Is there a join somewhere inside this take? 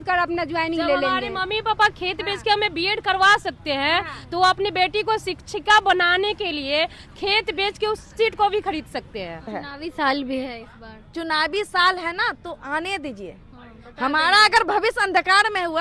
yes; 1 cut; at 9.6 s

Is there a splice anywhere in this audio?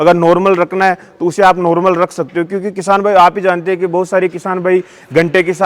no; 0 cuts

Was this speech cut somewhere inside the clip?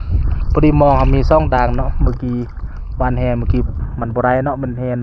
no; 0 cuts

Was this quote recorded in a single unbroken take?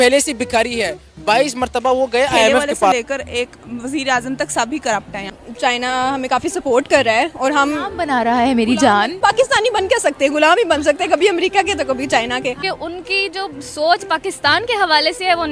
no; 4 cuts; at 2.9 s, 5.3 s, 9.1 s, 12.6 s

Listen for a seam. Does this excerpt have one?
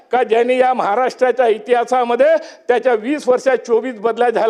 no; 0 cuts

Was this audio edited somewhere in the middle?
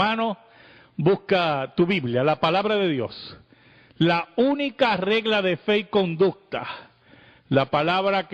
yes; 1 cut; at 5.1 s

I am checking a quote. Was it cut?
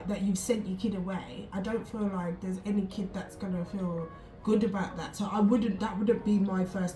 no; 0 cuts

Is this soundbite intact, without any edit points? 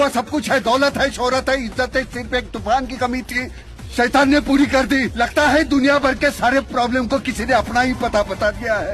yes; 0 cuts

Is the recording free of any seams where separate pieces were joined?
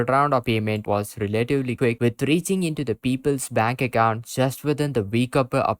yes; 0 cuts

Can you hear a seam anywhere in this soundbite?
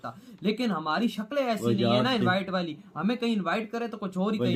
no; 0 cuts

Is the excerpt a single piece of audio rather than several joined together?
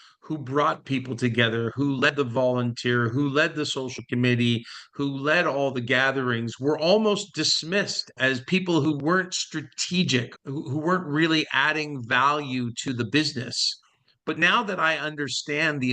no; 1 cut; at 8.2 s

